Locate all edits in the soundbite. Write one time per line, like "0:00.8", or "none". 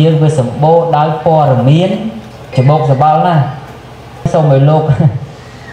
0:02.5
0:04.3